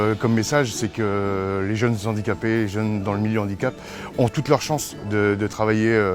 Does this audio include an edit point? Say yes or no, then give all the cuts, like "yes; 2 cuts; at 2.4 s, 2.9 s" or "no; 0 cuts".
no; 0 cuts